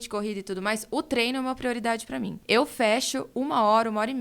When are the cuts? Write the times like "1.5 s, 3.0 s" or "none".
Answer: 2.4 s